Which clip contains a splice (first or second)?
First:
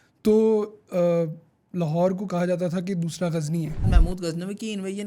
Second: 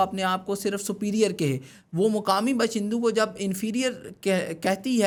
first